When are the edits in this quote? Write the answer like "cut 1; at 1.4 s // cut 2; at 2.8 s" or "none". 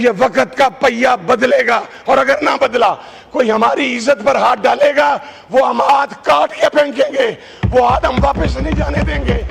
none